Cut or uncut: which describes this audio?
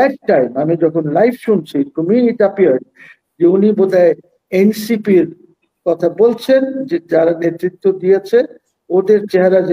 uncut